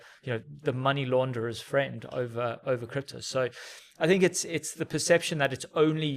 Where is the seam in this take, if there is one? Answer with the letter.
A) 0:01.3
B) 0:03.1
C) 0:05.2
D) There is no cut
D